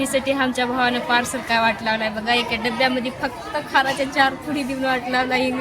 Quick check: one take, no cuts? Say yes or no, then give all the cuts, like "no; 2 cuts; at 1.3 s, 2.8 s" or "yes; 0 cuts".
yes; 0 cuts